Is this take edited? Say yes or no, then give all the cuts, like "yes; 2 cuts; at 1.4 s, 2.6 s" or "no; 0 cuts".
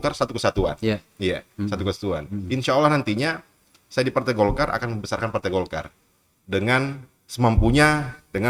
no; 0 cuts